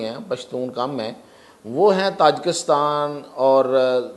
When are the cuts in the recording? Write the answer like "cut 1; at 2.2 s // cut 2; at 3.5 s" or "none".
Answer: none